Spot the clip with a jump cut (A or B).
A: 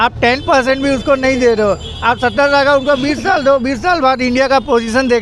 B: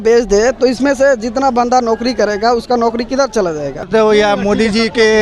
B